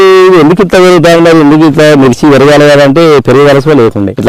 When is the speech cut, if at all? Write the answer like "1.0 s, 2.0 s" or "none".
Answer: none

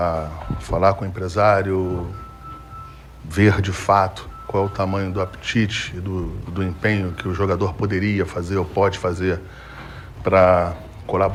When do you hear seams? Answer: none

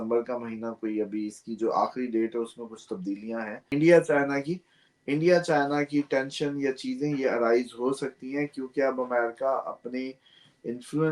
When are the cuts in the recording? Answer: 3.7 s

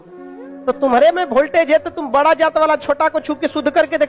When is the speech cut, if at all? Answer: none

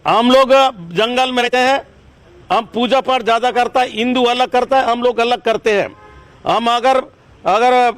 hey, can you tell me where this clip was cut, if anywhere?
1.4 s

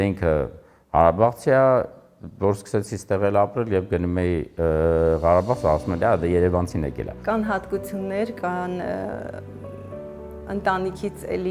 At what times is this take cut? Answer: 7.1 s

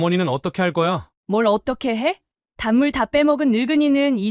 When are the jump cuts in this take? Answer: 1.1 s

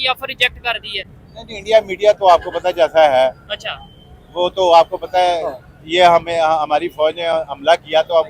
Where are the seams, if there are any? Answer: none

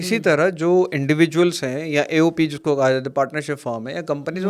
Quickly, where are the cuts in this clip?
none

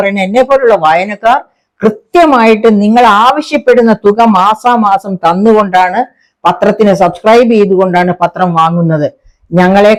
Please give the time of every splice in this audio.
none

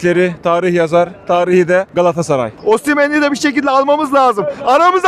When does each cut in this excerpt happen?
2.6 s

